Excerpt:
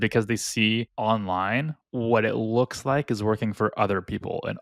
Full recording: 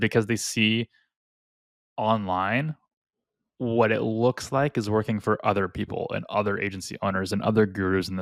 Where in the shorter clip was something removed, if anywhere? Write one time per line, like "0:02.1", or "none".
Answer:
0:00.9
0:01.8